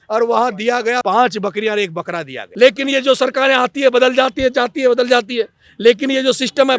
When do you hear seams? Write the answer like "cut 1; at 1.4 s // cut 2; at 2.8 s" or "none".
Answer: cut 1; at 1.0 s // cut 2; at 2.4 s

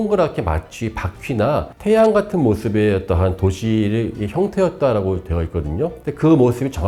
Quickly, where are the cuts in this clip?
none

